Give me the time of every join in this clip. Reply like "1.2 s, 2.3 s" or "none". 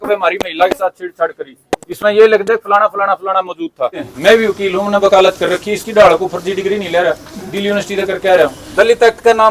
4.1 s, 8.6 s